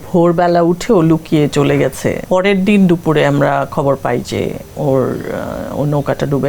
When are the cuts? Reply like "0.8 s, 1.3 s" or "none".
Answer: 2.2 s